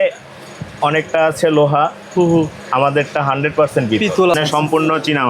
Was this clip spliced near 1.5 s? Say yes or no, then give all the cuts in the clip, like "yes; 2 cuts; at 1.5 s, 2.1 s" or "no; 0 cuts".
no; 1 cut; at 4.3 s